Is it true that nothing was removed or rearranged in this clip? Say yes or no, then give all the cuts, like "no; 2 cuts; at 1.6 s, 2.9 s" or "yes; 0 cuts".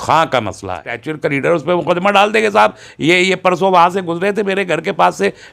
no; 1 cut; at 1.1 s